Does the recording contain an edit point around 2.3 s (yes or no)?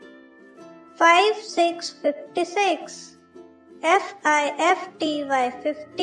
no